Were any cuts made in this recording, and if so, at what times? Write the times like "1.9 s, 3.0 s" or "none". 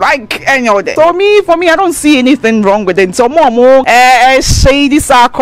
0.9 s, 3.9 s